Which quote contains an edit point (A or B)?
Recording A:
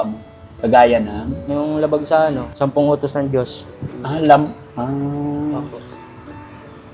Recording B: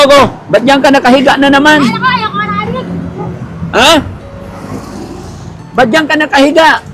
A